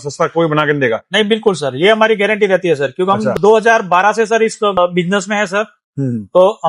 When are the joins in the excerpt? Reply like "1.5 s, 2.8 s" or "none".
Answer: none